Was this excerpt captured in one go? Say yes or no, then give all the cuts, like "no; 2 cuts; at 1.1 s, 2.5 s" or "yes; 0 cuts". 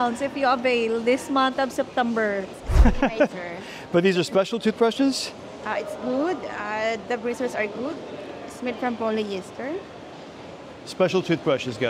no; 1 cut; at 2.6 s